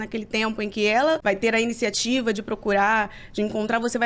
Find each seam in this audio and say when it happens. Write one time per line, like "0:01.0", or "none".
0:01.2